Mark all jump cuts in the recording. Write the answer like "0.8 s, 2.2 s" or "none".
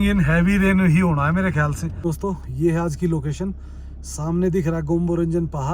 1.9 s